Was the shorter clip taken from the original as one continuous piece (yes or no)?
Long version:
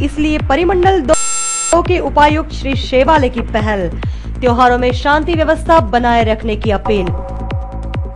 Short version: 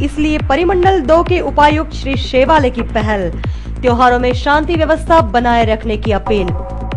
no